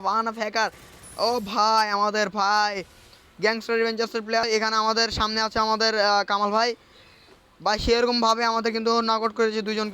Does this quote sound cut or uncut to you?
cut